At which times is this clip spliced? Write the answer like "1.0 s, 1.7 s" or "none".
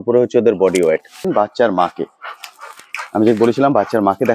1.3 s